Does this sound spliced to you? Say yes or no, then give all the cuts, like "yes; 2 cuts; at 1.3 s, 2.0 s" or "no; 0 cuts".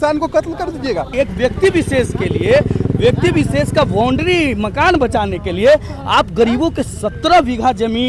yes; 1 cut; at 1.1 s